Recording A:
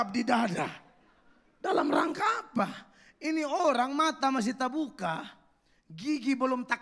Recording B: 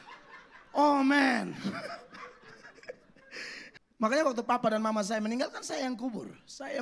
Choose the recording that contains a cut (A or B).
B